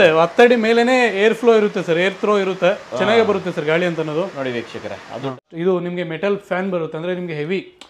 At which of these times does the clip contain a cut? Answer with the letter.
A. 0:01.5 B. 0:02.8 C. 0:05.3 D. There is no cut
C